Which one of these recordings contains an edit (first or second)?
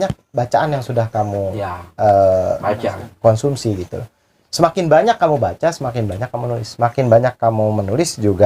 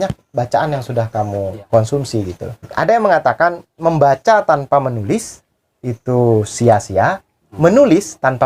second